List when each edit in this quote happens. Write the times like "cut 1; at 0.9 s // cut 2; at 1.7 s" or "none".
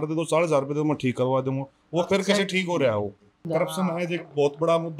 cut 1; at 3.4 s